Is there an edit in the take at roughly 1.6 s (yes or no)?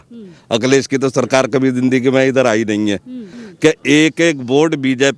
no